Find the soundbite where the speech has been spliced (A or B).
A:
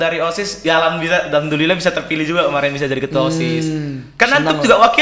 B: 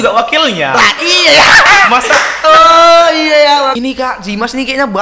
B